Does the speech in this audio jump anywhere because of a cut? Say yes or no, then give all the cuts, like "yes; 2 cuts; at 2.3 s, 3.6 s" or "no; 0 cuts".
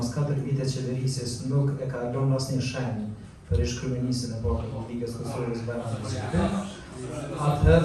no; 0 cuts